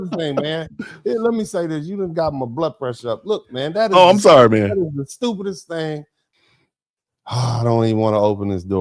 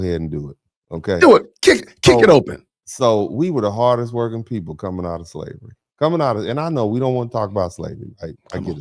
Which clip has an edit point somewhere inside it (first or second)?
first